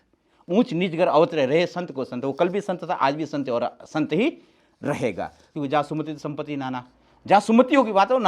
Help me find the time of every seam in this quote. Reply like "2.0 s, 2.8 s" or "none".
5.4 s